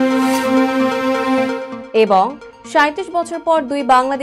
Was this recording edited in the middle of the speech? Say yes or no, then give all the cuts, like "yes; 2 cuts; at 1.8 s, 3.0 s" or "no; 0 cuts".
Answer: no; 0 cuts